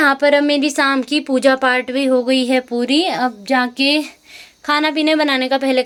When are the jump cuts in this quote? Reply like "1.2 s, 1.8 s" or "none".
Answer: none